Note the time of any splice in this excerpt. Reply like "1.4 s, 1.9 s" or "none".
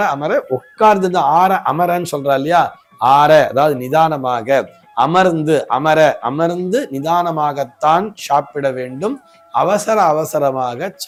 none